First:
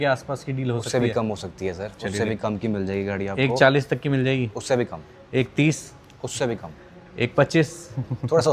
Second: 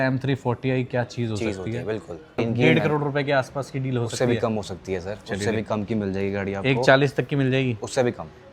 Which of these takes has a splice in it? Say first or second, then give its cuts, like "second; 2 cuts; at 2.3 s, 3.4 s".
second; 1 cut; at 2.3 s